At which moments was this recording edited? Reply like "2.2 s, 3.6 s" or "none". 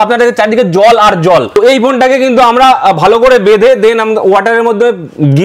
1.6 s